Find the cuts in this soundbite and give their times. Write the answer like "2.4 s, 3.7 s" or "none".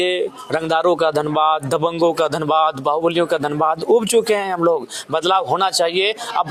none